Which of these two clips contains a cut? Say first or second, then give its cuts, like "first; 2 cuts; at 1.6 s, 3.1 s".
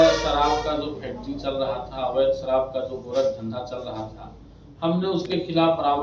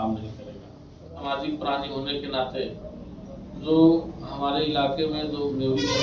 second; 1 cut; at 1.2 s